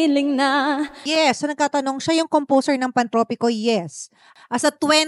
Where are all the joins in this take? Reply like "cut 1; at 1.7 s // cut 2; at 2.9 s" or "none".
cut 1; at 1.0 s